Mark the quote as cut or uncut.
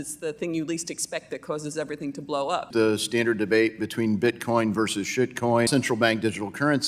cut